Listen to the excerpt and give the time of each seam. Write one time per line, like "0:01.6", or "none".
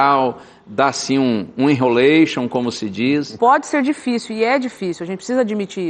0:03.3

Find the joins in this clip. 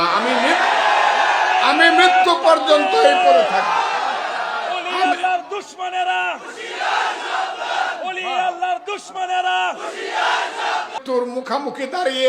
0:10.9

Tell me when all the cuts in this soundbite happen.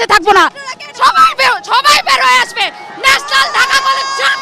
none

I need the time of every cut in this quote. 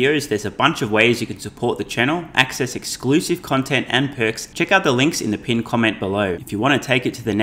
0:04.5
0:06.4

